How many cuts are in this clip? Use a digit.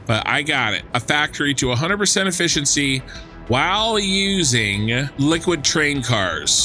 2